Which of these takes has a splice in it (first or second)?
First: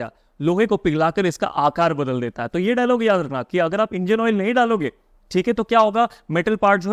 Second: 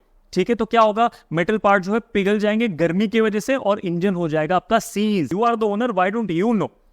second